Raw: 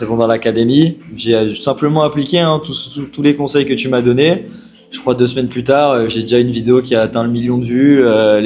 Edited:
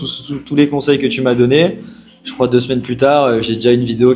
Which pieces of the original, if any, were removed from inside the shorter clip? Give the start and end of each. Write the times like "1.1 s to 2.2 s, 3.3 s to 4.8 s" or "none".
none